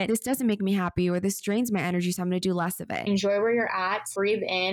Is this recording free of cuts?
no; 1 cut; at 3.0 s

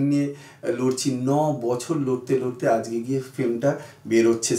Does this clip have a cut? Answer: no; 0 cuts

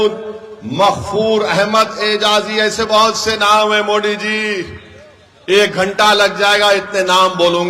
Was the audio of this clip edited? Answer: no; 0 cuts

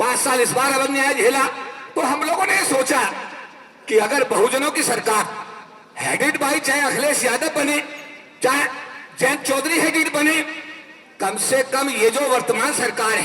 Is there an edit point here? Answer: no; 0 cuts

